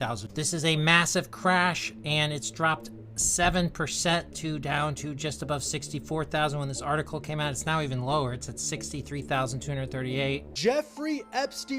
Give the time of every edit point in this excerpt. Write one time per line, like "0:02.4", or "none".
0:10.5